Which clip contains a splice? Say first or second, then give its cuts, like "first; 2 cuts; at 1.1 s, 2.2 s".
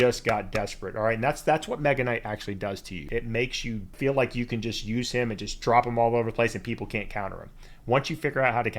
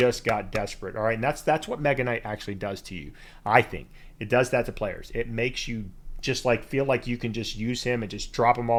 first; 2 cuts; at 3.0 s, 3.9 s